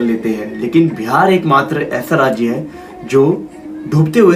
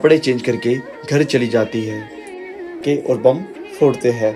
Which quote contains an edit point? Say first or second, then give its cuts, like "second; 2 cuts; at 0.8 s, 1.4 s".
second; 1 cut; at 2.8 s